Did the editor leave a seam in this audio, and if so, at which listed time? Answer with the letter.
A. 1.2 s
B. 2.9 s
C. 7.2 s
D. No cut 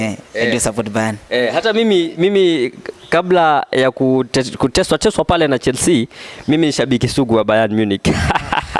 D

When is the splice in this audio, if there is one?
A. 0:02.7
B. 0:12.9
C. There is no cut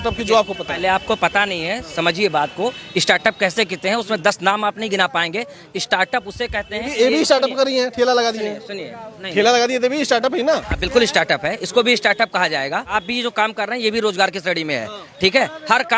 B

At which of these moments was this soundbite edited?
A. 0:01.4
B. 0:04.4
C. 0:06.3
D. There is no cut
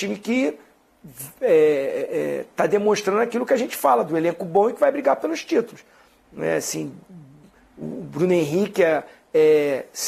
D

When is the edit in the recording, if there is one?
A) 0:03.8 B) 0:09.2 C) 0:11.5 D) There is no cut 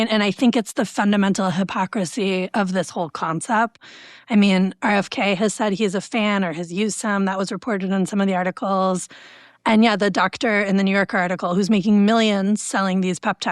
A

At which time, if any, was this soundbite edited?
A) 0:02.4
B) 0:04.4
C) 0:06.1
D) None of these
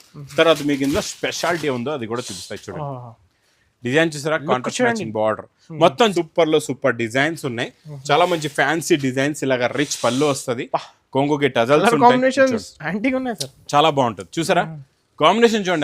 C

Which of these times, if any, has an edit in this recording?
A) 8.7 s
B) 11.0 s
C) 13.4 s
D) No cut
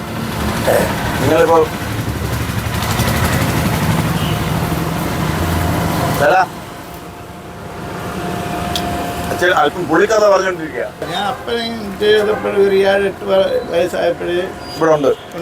B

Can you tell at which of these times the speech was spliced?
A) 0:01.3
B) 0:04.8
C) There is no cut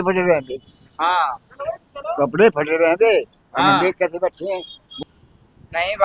B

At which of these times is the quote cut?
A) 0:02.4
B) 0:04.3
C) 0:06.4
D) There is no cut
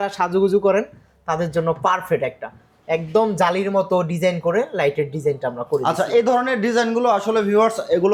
D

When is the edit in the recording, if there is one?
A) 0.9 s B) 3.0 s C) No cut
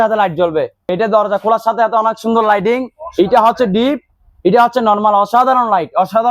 A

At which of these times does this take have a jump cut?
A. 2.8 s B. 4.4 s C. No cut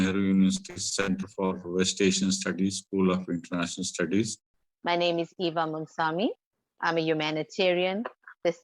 B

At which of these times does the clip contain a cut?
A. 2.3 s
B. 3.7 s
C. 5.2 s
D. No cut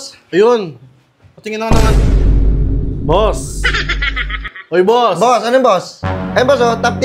D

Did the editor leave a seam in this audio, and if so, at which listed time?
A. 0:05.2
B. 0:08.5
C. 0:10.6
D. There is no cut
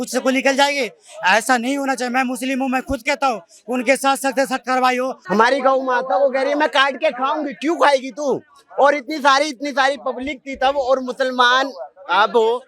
A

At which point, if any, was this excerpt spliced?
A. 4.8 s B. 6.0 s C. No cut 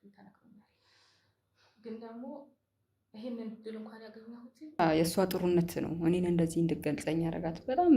A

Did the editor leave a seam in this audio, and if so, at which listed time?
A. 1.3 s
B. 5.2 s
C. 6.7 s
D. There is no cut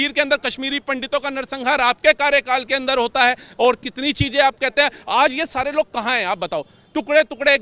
D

